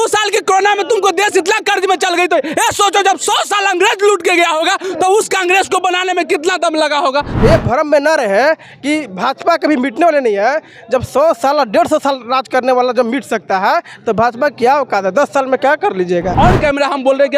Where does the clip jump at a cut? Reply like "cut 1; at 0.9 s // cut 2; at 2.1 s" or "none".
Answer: cut 1; at 7.3 s // cut 2; at 16.3 s